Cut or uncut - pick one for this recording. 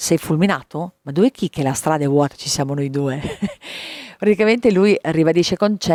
uncut